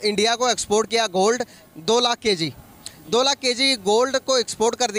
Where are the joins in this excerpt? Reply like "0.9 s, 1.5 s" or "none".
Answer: none